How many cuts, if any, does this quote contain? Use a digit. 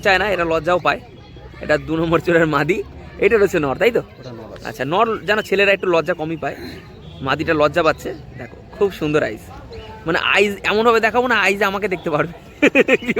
0